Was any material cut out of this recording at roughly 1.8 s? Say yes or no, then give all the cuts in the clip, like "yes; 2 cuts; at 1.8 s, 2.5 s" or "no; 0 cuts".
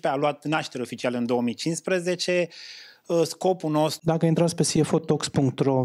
no; 1 cut; at 4.0 s